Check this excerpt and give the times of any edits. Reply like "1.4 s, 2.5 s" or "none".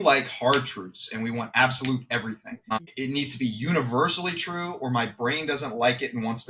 2.6 s